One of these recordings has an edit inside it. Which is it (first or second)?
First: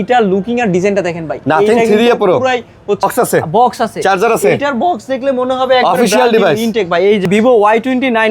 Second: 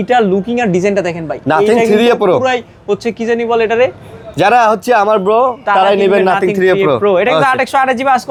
first